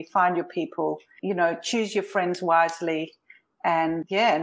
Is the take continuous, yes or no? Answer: yes